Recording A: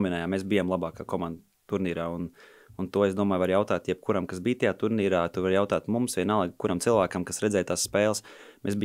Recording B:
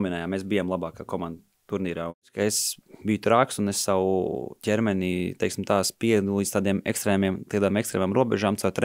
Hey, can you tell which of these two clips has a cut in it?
B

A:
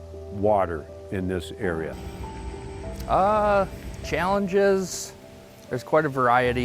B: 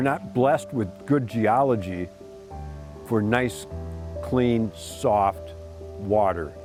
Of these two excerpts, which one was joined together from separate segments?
A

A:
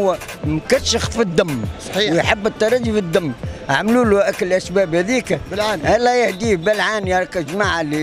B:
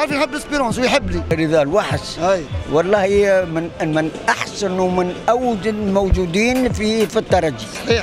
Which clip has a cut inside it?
B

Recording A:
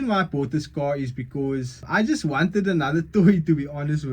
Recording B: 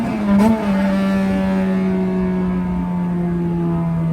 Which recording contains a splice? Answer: A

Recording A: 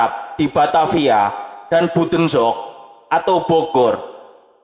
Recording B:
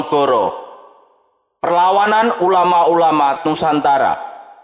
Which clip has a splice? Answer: B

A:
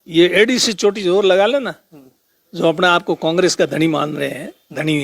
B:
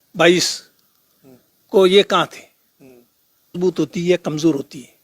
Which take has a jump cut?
B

